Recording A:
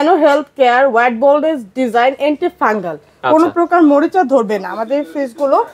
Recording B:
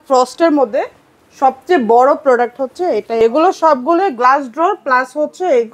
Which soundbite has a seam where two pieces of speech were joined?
B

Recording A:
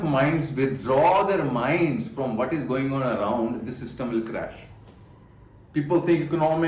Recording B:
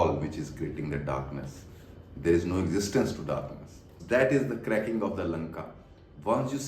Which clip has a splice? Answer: B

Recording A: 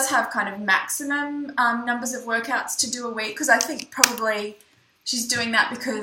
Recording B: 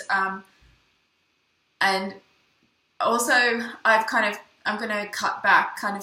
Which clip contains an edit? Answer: B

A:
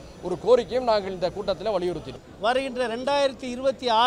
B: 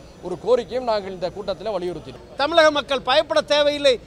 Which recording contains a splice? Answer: B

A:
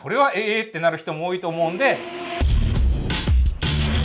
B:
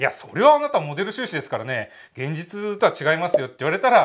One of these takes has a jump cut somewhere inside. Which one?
A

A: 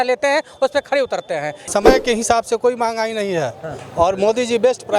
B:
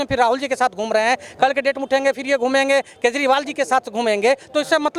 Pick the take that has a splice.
A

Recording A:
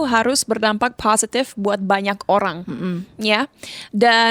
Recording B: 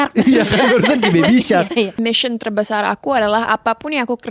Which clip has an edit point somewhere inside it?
B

